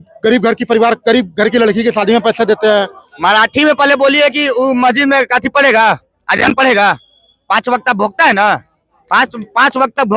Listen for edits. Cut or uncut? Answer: cut